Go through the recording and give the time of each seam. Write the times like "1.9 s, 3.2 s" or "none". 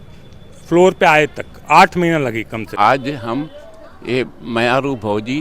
2.6 s